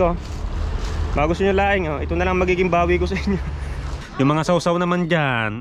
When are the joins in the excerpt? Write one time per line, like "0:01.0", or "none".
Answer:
0:04.0